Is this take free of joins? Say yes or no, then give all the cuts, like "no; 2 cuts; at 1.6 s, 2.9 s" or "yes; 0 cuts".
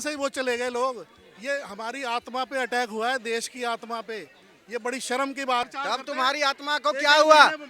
no; 1 cut; at 5.7 s